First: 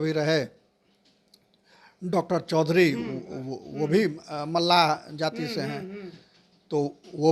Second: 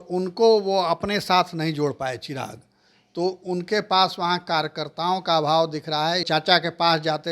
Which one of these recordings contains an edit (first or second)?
second